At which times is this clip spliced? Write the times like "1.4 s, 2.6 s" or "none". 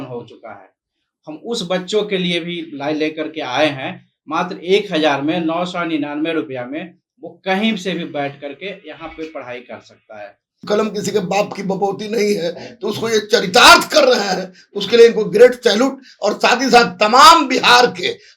10.6 s